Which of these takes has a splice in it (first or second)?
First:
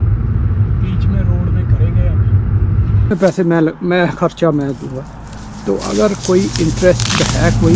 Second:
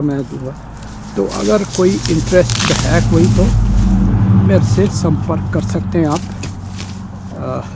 first